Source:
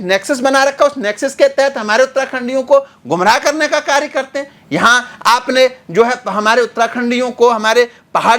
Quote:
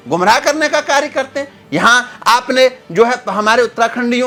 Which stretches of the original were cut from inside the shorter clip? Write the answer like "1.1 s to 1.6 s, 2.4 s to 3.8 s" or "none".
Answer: none